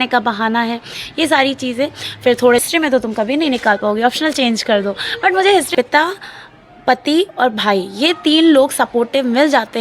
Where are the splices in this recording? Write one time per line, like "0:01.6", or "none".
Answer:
0:02.6
0:05.7